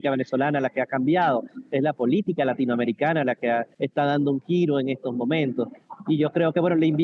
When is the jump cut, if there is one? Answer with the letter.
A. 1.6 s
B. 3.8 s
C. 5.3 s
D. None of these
B